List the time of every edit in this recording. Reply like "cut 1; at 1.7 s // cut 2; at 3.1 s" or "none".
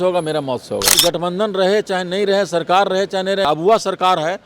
cut 1; at 0.9 s // cut 2; at 3.5 s